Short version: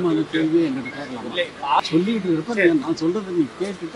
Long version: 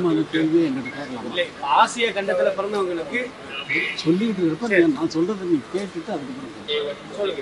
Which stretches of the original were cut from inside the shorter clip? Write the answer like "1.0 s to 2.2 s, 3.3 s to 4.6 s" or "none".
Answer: 1.8 s to 3.9 s